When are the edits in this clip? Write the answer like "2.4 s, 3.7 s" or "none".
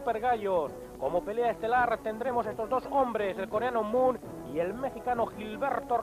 none